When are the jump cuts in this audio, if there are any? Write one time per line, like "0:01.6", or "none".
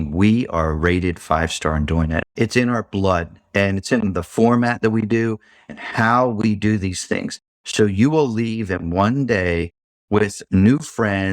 0:02.2